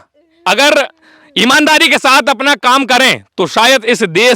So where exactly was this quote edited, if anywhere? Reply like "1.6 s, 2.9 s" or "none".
none